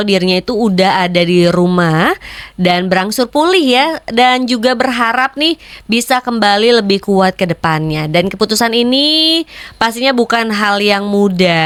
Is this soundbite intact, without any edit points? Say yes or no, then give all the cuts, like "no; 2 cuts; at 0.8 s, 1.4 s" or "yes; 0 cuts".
yes; 0 cuts